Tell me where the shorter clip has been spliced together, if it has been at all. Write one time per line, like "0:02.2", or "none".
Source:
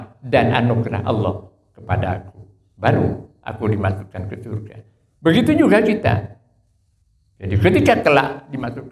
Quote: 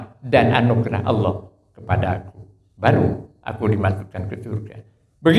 none